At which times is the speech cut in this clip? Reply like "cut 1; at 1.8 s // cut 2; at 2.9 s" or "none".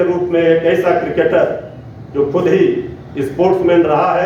none